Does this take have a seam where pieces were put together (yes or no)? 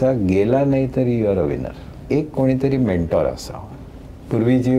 yes